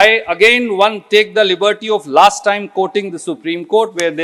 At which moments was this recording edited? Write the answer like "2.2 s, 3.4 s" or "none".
none